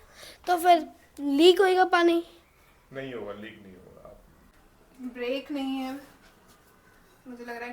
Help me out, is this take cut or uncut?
cut